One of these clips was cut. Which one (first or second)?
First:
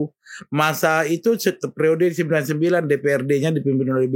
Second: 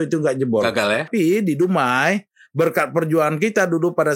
second